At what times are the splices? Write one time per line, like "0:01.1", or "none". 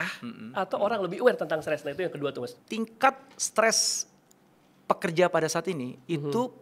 0:02.5